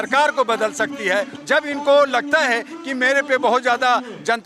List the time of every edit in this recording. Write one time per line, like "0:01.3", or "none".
0:01.4